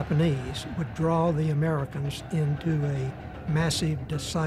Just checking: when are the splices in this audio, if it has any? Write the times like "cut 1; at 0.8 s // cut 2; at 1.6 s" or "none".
none